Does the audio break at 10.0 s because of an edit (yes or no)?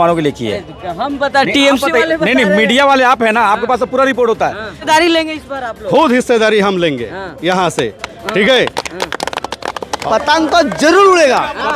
yes